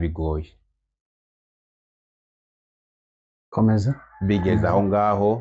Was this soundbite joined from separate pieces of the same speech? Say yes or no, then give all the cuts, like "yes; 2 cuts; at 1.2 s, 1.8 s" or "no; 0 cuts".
no; 0 cuts